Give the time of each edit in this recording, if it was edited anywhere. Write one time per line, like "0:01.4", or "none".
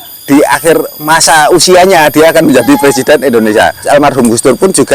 0:03.8